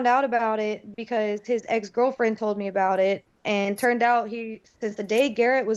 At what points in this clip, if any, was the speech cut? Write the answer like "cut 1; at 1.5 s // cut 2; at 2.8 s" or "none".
none